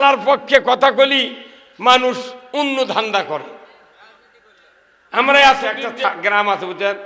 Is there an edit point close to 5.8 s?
yes; 1 cut; at 5.8 s

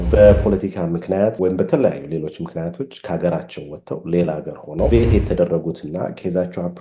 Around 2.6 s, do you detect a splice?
no; 2 cuts; at 1.4 s, 4.9 s

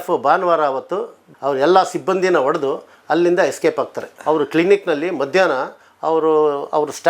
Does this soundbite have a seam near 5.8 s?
no; 1 cut; at 4.1 s

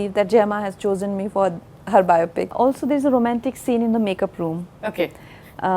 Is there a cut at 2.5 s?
yes; 1 cut; at 2.5 s

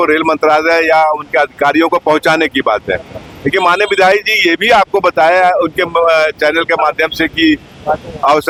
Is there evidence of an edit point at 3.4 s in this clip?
no; 0 cuts

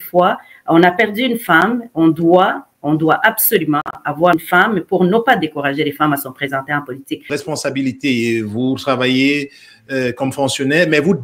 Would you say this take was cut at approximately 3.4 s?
no; 1 cut; at 7.3 s

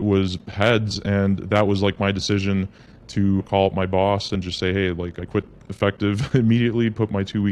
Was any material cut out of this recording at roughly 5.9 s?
no; 0 cuts

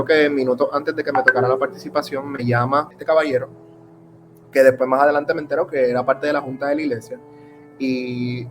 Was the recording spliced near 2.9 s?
yes; 1 cut; at 2.9 s

